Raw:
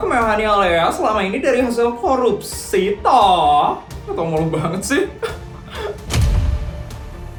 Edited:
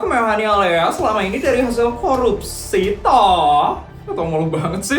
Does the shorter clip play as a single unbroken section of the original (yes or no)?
yes